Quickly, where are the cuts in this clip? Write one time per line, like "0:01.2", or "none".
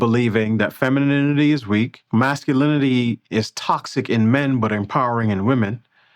0:02.0